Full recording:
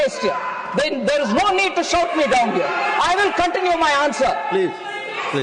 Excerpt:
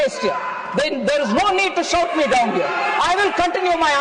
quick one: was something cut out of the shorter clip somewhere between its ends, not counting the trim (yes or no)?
no